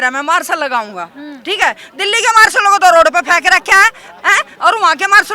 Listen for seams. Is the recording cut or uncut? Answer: uncut